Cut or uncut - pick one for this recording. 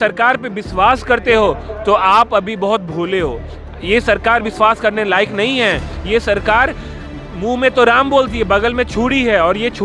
uncut